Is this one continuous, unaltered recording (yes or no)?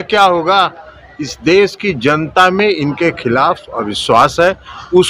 yes